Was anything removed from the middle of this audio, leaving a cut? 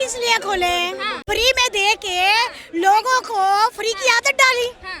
yes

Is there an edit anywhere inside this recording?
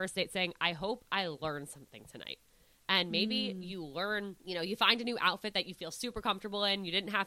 yes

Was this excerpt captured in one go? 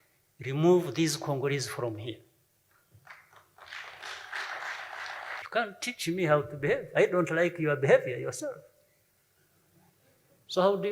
no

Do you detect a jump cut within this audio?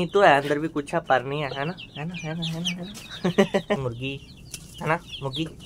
yes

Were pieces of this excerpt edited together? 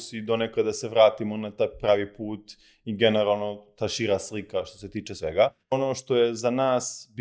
yes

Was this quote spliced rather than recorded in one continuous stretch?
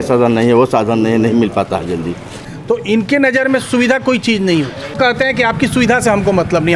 yes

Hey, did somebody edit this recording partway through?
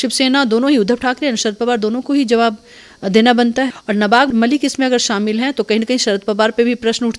yes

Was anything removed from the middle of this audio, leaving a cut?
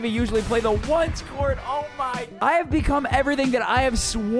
yes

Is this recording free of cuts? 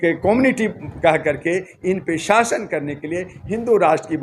yes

